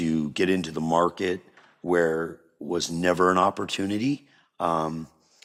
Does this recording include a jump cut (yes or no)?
no